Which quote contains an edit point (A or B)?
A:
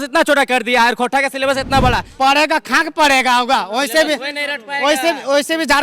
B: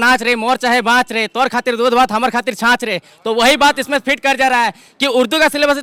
A